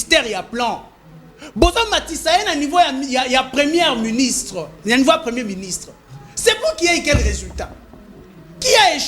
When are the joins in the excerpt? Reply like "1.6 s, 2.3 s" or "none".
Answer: none